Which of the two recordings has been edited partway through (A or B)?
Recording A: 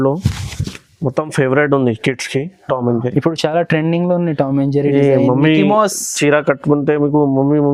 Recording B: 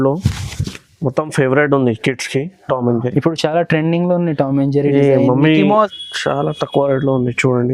B